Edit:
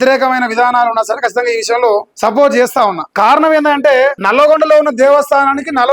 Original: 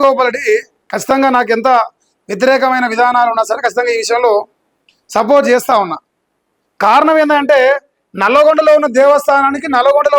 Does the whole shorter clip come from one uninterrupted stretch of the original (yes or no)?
no